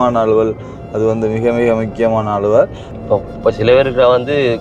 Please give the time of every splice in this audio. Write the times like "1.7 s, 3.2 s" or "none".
2.9 s

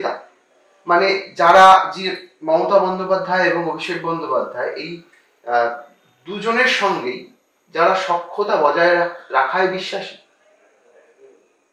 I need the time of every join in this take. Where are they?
none

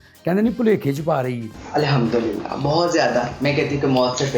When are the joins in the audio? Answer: 1.6 s

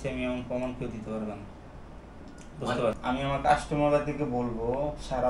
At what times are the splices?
3.0 s

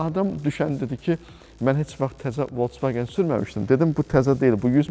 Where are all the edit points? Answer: none

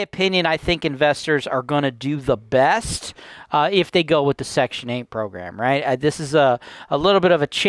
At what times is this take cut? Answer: none

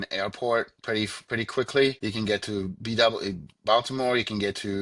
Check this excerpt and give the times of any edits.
2.0 s

